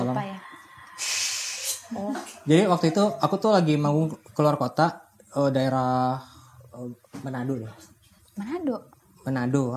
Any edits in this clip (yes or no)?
no